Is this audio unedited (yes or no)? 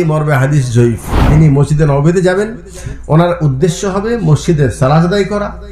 no